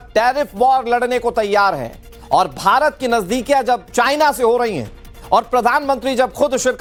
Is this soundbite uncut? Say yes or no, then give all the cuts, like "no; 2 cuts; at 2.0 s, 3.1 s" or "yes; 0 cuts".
yes; 0 cuts